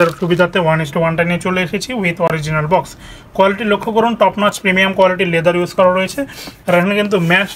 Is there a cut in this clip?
no; 0 cuts

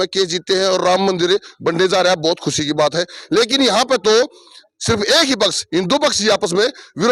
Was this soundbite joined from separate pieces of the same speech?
no; 0 cuts

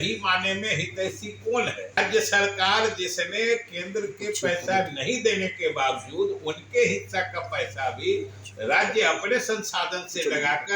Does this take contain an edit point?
yes; 1 cut; at 2.0 s

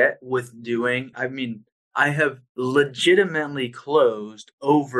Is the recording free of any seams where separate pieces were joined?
no; 2 cuts; at 1.1 s, 2.4 s

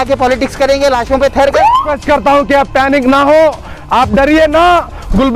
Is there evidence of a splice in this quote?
yes; 1 cut; at 1.9 s

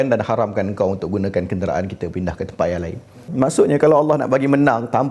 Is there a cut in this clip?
yes; 1 cut; at 3.3 s

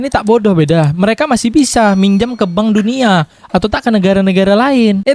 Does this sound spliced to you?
no; 0 cuts

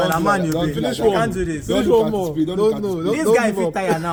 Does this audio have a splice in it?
no; 0 cuts

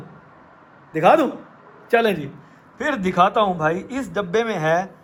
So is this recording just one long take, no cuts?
yes; 0 cuts

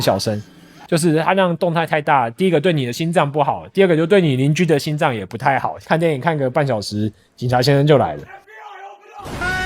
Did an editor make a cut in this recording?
yes; 1 cut; at 5.7 s

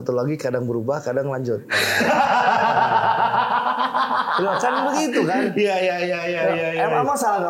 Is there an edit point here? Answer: no; 0 cuts

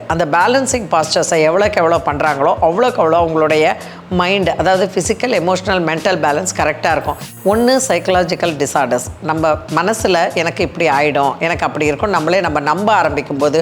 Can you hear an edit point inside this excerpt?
yes; 1 cut; at 7.2 s

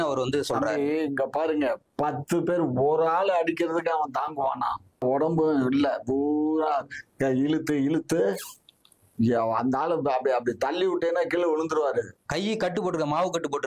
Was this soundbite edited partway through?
yes; 2 cuts; at 5.0 s, 12.2 s

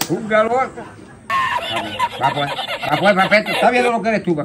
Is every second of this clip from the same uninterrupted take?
yes; 0 cuts

